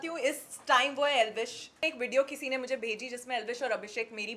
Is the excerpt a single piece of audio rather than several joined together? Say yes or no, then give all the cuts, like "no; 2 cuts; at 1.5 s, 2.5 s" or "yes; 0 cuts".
no; 1 cut; at 1.8 s